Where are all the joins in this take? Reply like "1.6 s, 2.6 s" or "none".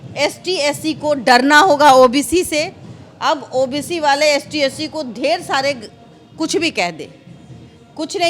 none